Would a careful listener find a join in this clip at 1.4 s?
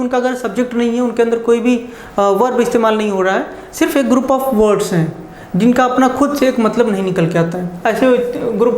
no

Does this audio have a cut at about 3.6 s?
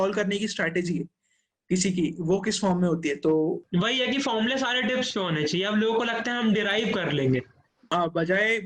yes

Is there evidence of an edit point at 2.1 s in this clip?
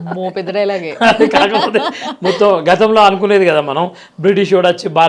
no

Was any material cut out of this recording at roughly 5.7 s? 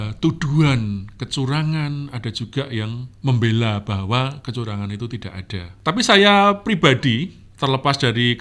no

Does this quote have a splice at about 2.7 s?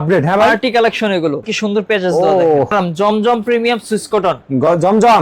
yes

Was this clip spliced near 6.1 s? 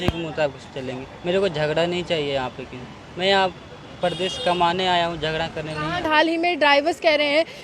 yes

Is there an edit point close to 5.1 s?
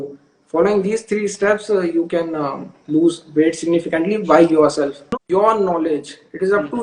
yes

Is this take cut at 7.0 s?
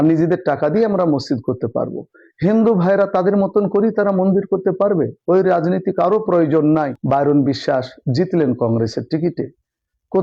yes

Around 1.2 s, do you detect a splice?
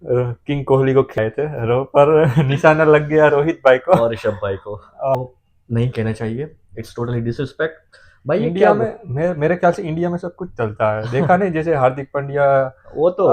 yes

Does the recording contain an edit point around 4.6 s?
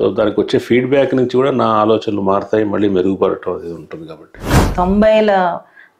yes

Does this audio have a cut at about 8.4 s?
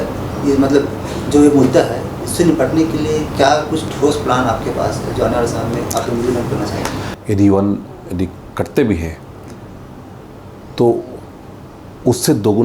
no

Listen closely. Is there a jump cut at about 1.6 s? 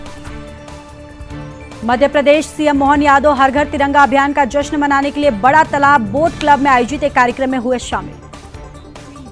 yes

